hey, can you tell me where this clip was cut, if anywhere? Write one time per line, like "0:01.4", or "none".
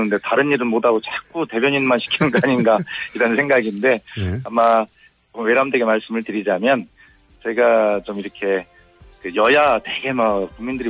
none